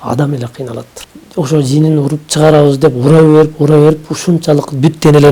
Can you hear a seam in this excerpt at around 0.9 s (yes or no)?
yes